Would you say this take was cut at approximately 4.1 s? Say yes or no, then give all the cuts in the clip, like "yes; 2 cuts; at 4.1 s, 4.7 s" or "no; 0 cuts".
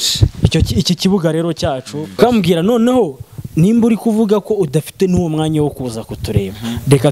no; 1 cut; at 2.2 s